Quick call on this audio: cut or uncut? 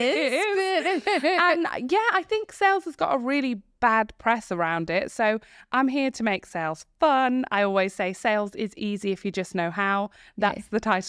uncut